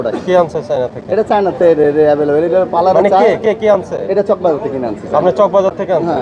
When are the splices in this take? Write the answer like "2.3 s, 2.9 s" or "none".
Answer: none